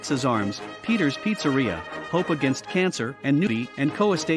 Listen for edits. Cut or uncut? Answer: cut